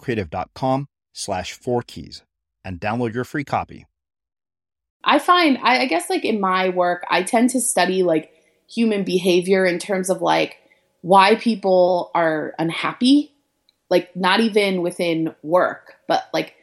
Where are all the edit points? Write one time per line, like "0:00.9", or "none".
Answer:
0:04.9